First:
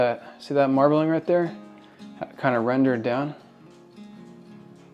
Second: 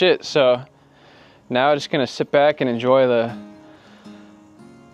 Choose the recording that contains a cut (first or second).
first